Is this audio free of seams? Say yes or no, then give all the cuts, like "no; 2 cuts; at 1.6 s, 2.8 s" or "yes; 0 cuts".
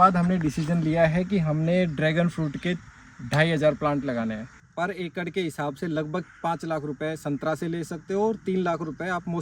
no; 1 cut; at 4.6 s